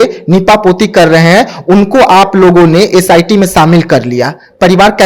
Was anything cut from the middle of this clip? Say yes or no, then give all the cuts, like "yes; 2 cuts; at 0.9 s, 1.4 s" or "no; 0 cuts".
no; 0 cuts